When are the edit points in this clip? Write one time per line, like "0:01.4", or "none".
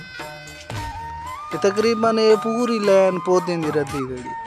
none